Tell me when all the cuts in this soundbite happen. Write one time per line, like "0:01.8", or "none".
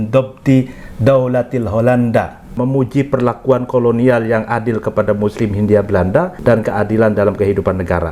0:02.5
0:06.3